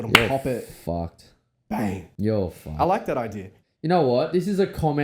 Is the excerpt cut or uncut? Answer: cut